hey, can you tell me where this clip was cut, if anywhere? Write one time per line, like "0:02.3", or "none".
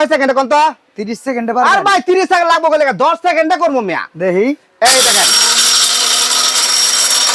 none